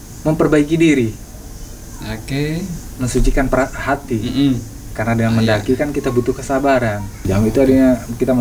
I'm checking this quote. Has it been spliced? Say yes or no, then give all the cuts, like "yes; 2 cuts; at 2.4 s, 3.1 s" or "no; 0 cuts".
yes; 1 cut; at 7.1 s